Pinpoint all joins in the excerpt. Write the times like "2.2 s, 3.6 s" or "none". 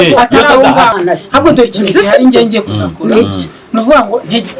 1.0 s